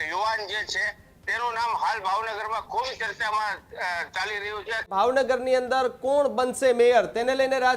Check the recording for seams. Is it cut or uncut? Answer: cut